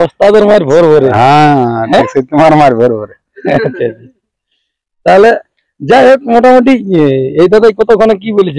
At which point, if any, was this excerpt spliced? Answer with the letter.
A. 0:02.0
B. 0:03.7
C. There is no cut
C